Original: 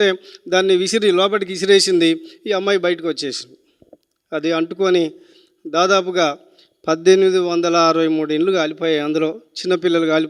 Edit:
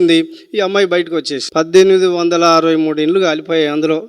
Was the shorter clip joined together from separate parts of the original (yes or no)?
yes